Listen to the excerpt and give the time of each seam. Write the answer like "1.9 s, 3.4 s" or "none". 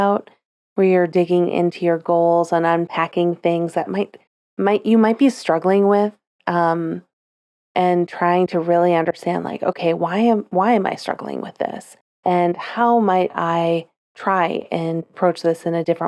none